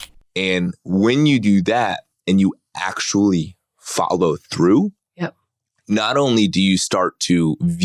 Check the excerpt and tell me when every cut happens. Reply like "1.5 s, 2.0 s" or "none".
none